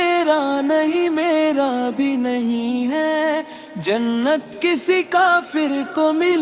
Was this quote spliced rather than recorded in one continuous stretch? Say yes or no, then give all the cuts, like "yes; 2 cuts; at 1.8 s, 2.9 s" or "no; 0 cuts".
no; 0 cuts